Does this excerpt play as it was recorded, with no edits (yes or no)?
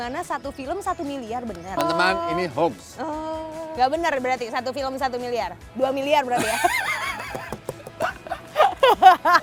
yes